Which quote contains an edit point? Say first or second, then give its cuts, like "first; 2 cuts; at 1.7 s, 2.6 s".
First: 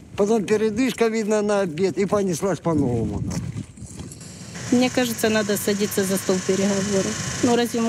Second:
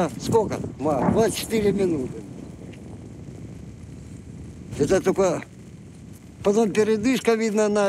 first; 1 cut; at 4.2 s